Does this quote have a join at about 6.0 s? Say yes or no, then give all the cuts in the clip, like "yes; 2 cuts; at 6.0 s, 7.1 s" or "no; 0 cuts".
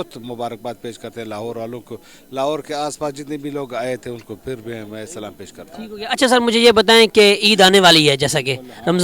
no; 0 cuts